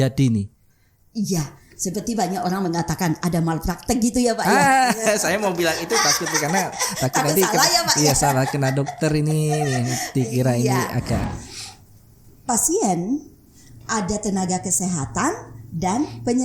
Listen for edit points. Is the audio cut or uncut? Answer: cut